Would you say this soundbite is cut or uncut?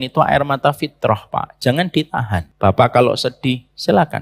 cut